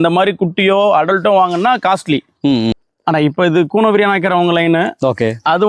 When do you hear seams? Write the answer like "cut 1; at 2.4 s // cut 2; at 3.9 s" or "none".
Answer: cut 1; at 2.7 s